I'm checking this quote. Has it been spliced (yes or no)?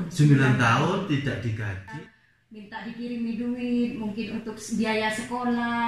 yes